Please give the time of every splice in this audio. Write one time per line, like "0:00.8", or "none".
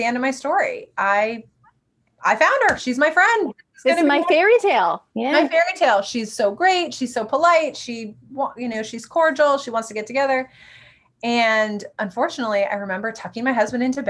none